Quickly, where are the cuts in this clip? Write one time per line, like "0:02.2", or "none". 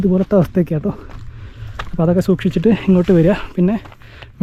none